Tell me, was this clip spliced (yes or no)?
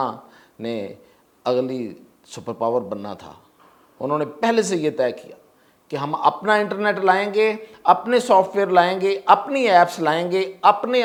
no